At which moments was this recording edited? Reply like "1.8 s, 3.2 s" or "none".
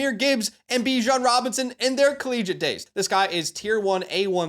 2.8 s